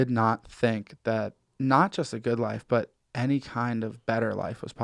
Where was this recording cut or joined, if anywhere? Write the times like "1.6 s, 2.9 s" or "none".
1.4 s